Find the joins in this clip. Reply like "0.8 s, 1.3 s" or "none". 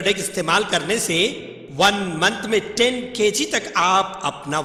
none